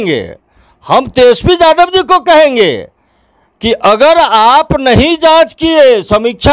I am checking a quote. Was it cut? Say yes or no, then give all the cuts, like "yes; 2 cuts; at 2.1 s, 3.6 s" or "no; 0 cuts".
no; 0 cuts